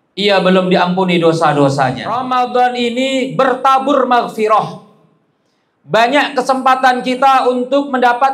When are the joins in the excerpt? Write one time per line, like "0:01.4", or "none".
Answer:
0:02.1